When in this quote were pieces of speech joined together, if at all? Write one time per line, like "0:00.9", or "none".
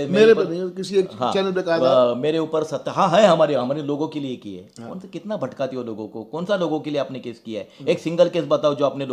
none

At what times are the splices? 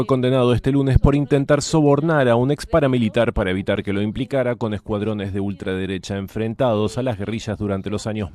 none

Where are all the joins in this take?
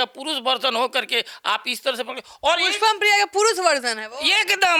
none

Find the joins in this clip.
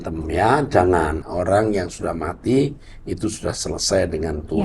0:01.2

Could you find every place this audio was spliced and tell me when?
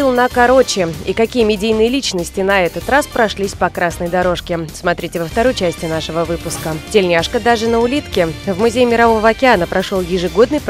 none

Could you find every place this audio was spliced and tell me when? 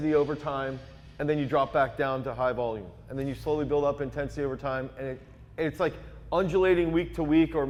none

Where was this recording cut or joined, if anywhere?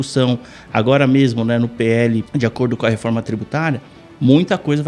0:02.3

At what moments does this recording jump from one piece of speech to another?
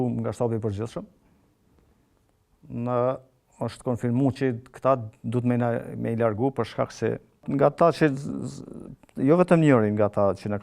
0:07.3

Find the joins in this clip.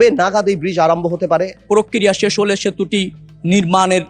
0:01.6

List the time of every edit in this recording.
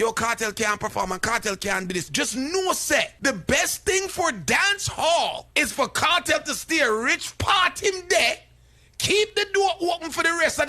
0:02.1
0:03.1
0:05.4

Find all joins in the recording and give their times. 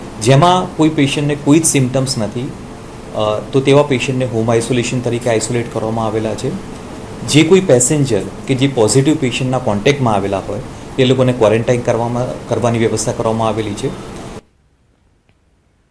0:01.7

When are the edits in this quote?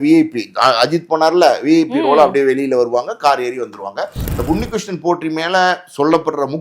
0:04.2

